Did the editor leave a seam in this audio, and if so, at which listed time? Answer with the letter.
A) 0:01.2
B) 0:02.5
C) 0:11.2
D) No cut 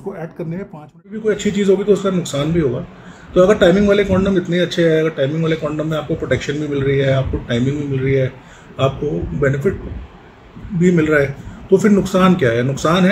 A